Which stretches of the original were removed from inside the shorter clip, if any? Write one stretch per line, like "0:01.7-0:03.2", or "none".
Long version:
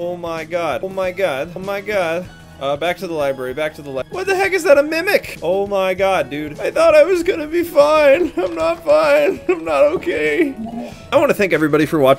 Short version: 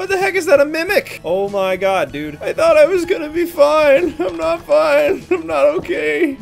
none

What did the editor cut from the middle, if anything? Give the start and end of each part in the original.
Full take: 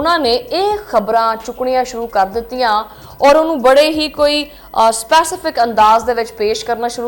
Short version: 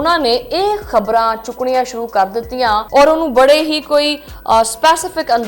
0:02.9-0:03.1

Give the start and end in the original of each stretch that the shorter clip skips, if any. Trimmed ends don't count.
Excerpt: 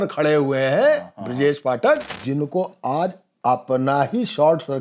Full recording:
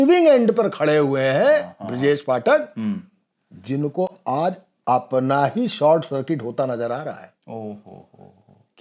0:02.7-0:03.5

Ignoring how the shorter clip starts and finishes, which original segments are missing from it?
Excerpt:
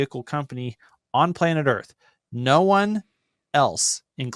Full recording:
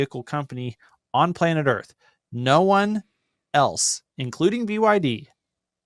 none

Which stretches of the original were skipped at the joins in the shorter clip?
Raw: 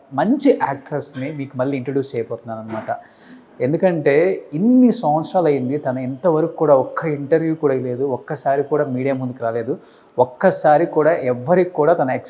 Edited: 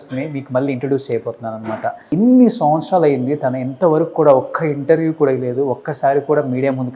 0:03.1-0:04.5

